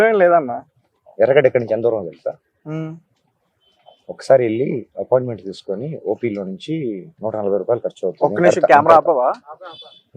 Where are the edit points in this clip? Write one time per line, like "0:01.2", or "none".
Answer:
none